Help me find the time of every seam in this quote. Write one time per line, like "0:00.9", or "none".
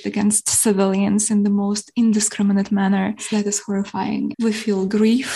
0:03.2
0:04.3

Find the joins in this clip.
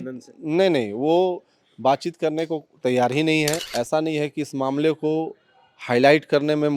0:03.6

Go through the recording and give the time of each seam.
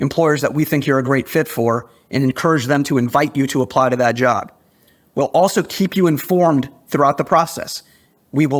none

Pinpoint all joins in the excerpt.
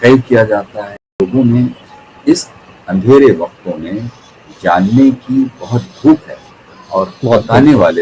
0:01.2

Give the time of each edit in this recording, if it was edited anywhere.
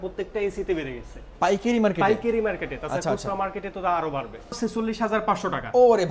0:04.5

